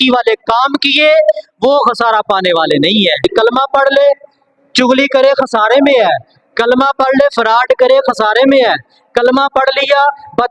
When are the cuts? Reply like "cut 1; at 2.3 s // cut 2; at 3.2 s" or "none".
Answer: cut 1; at 3.2 s